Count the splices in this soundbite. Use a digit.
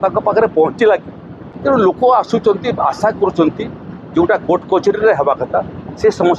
1